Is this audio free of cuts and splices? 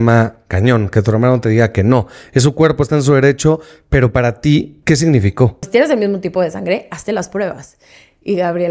no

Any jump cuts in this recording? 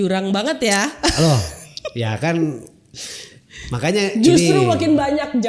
no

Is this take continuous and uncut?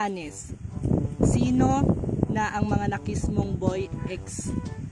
yes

